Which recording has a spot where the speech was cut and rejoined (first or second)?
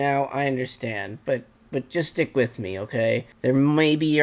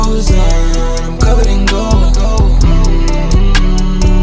first